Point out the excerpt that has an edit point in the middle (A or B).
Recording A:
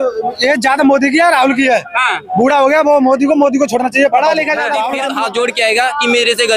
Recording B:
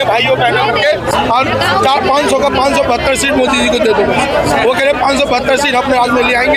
A